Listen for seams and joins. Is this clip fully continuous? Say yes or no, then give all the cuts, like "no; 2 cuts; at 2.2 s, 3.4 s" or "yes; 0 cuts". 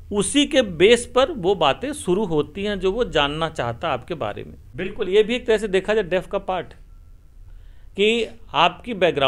no; 1 cut; at 4.6 s